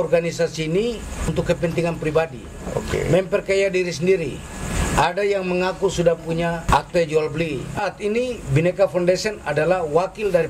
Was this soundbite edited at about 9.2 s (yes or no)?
no